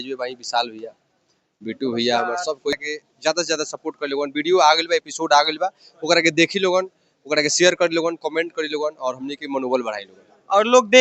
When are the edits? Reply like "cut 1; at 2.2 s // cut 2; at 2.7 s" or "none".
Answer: cut 1; at 2.8 s

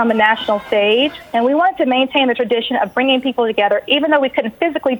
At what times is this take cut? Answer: cut 1; at 1.2 s

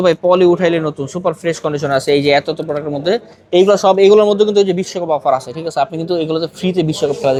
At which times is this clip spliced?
none

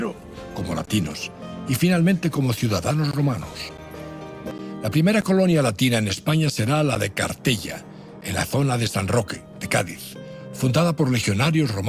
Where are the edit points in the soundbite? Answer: cut 1; at 4.4 s

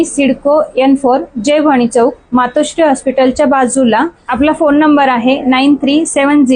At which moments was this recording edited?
cut 1; at 4.2 s

